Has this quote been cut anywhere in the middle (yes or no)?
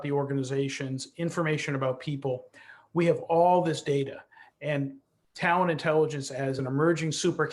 yes